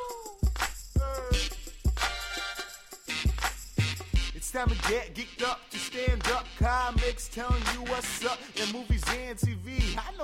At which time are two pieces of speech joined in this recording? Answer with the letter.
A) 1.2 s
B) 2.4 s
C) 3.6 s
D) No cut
C